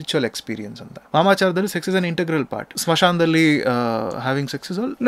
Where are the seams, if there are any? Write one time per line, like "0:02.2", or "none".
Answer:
0:01.1
0:02.7